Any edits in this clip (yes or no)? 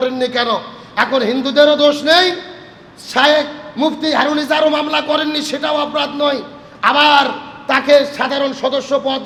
no